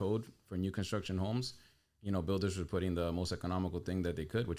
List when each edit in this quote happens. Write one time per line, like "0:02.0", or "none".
none